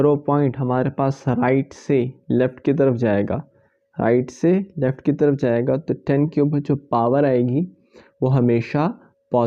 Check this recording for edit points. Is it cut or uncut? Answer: uncut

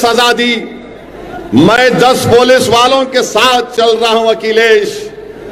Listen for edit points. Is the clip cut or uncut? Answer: uncut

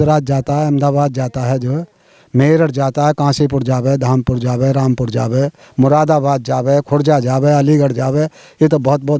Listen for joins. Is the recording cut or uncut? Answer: uncut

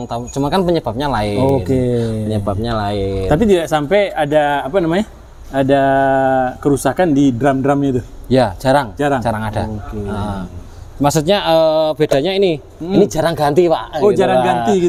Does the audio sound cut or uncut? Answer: uncut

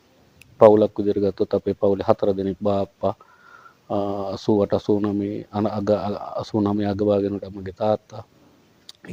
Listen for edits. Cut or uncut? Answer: uncut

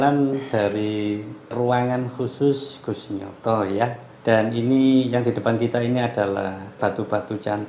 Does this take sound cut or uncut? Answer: cut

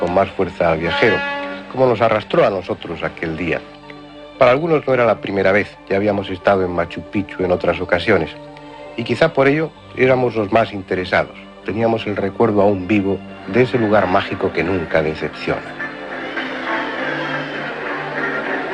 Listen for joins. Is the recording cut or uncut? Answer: uncut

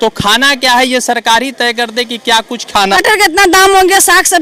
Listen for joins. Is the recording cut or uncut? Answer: cut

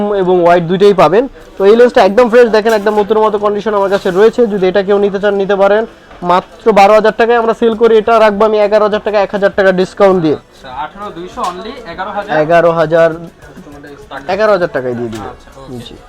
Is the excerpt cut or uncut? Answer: uncut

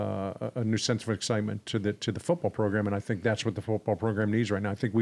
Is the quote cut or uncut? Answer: uncut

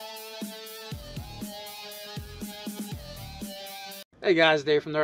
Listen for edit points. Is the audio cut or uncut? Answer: uncut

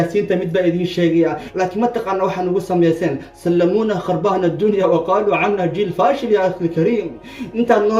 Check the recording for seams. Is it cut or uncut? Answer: cut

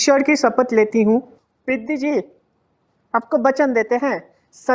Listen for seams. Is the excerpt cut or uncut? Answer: cut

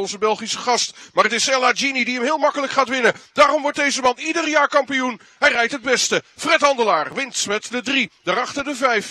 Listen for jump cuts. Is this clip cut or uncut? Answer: uncut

